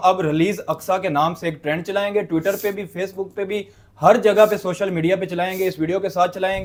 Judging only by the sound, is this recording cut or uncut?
uncut